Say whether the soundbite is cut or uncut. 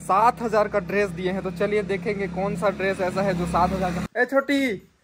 cut